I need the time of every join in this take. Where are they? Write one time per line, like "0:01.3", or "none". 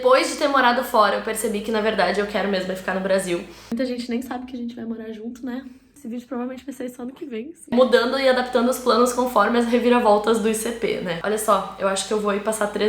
0:03.7
0:06.0
0:07.7
0:11.2